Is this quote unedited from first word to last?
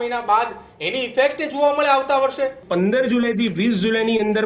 no; 1 cut; at 2.6 s

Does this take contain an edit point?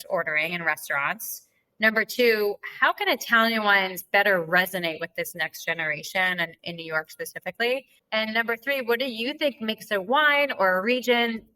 yes; 1 cut; at 7.9 s

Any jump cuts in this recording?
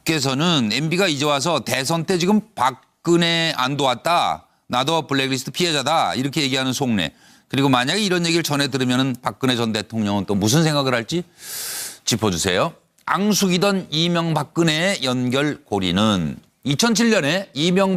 no; 0 cuts

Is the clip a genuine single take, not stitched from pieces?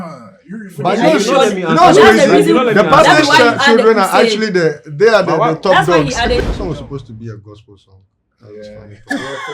no; 1 cut; at 6.4 s

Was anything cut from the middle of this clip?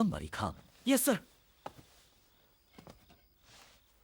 yes; 1 cut; at 1.4 s

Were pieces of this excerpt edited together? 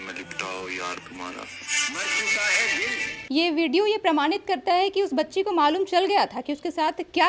no; 0 cuts

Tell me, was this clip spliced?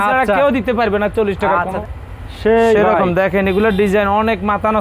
yes; 1 cut; at 1.8 s

